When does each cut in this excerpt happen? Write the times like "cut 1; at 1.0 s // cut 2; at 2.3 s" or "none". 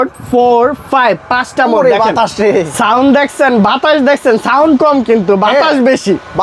none